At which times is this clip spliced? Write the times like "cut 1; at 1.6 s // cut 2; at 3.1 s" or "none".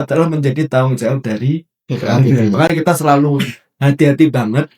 none